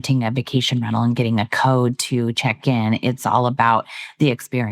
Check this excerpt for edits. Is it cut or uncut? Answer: uncut